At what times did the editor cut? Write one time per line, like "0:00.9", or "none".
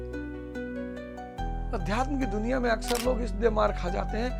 0:01.5